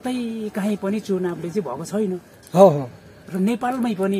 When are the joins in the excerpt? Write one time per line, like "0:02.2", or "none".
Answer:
none